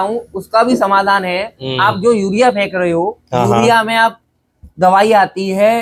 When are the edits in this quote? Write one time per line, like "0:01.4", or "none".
none